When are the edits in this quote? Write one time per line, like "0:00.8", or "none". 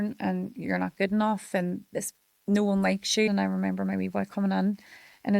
0:03.3